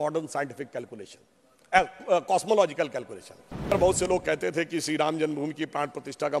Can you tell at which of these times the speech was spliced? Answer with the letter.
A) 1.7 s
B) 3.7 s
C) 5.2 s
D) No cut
B